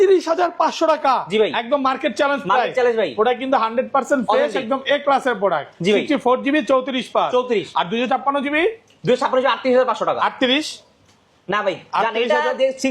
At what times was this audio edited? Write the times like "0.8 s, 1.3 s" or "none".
none

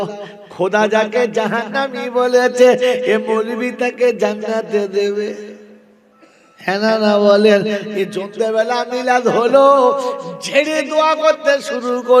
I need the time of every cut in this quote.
none

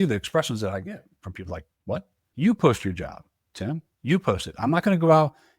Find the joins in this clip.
2.2 s

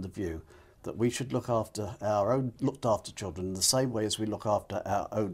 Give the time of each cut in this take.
2.5 s

